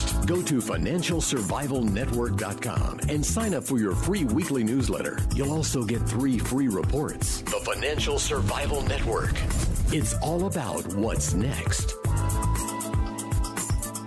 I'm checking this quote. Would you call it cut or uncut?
uncut